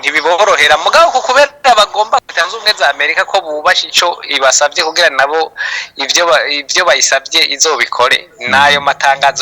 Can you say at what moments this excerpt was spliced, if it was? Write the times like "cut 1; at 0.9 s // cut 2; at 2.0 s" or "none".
cut 1; at 2.3 s